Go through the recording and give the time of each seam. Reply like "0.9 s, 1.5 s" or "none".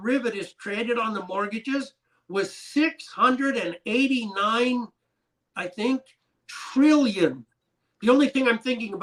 none

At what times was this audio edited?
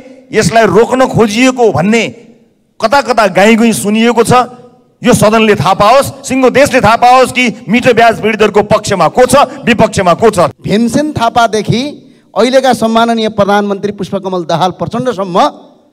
10.5 s

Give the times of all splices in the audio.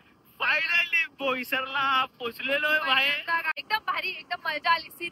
3.6 s

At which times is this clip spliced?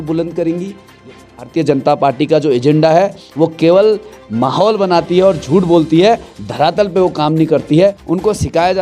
1.4 s, 8.0 s

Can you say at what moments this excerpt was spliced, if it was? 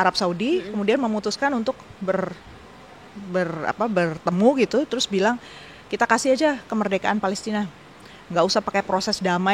none

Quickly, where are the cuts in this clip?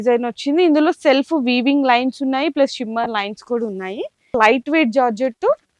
4.3 s

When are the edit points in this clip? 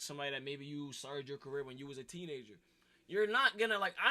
2.8 s

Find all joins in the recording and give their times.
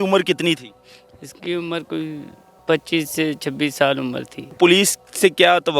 4.5 s

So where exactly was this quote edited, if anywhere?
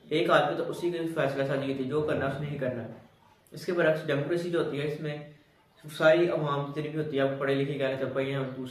none

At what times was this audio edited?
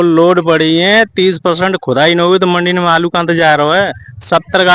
none

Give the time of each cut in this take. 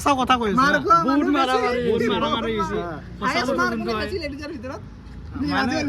3.0 s

